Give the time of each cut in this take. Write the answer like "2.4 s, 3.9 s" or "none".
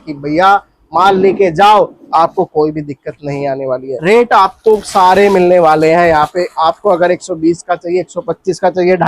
3.9 s